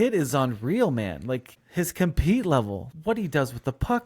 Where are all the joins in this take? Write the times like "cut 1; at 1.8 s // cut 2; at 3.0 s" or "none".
cut 1; at 1.6 s // cut 2; at 2.9 s